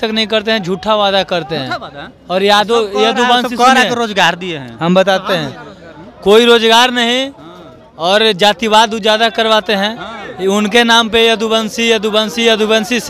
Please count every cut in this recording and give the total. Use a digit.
0